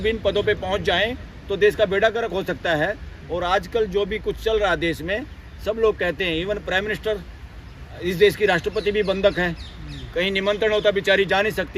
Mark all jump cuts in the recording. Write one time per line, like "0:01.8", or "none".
none